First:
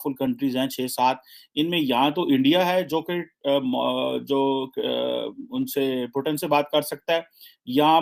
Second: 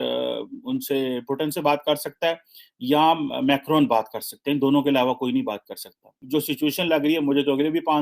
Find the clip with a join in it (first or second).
second